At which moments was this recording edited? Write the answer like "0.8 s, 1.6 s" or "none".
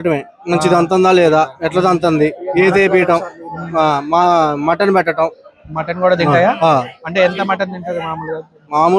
none